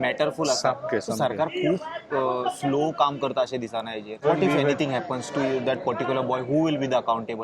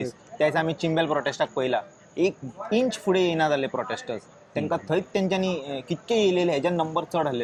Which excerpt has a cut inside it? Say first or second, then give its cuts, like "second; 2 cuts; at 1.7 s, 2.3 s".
first; 1 cut; at 4.2 s